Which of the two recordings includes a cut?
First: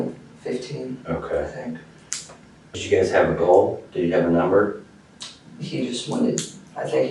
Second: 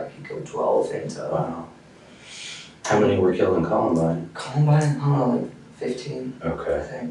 first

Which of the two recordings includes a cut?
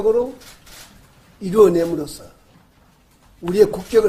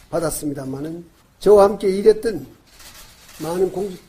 second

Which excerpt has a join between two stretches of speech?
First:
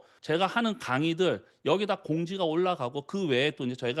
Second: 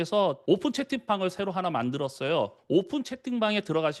second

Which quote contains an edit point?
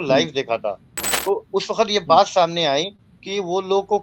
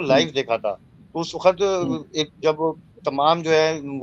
first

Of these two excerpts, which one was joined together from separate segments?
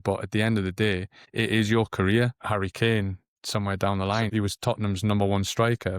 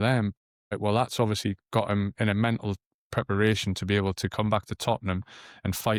first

